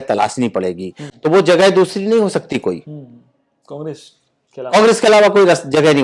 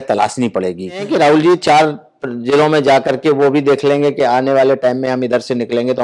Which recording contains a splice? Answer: second; 1 cut; at 1.1 s

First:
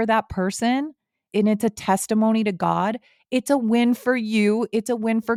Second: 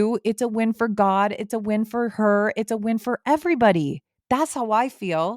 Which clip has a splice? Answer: second; 1 cut; at 4.1 s

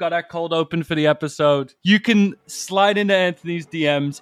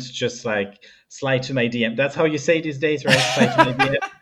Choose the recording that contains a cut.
first; 1 cut; at 1.8 s

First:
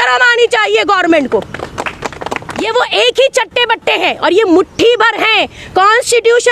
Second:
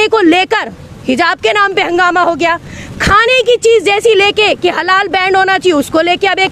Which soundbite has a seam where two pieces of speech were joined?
first; 2 cuts; at 2.7 s, 5.6 s

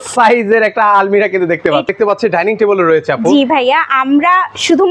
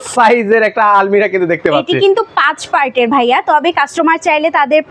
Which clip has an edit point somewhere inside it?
first; 1 cut; at 1.9 s

